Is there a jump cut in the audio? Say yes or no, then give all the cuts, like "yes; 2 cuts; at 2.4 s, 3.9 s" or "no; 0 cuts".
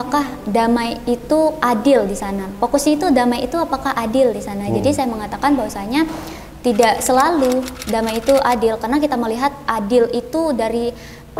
no; 0 cuts